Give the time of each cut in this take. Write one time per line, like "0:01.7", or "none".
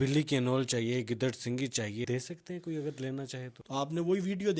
0:02.1
0:03.6